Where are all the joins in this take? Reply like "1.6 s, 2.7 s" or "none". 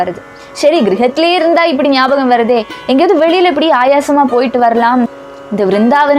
5.1 s